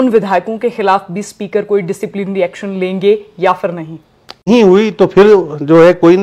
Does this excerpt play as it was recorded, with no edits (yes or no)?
no